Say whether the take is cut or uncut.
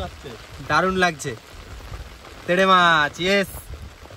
uncut